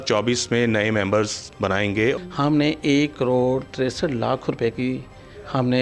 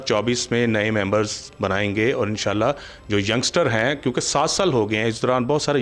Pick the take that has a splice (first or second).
first